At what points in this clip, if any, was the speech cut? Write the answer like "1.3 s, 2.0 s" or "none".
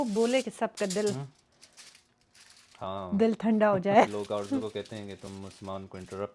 4.1 s